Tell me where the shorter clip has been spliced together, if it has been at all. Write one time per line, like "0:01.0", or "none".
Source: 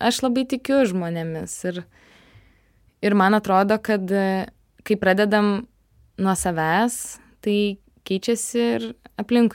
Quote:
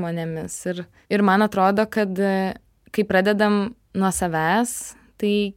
0:00.9
0:03.8